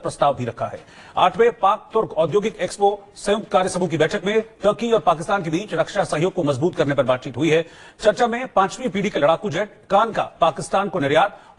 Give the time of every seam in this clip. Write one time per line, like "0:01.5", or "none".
none